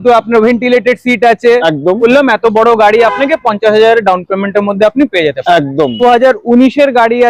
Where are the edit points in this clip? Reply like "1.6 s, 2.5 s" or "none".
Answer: 2.0 s, 6.0 s